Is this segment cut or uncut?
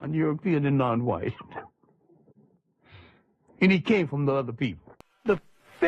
cut